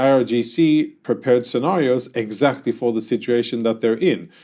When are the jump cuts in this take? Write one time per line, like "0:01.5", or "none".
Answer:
0:01.0